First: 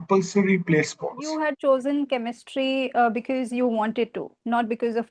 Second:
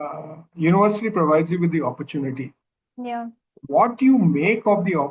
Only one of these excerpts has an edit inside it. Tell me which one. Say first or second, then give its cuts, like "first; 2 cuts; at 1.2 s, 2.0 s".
first; 1 cut; at 1.3 s